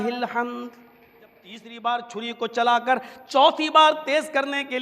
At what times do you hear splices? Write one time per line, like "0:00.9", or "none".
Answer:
0:01.7